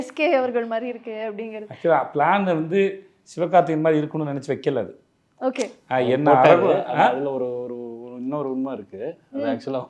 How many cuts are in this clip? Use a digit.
0